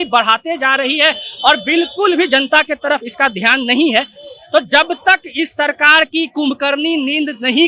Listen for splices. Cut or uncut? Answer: uncut